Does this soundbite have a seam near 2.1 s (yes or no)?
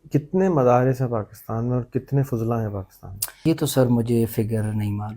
no